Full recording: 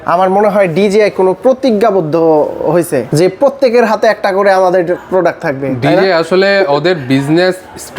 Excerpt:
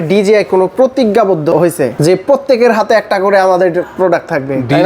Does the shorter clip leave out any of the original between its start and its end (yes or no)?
yes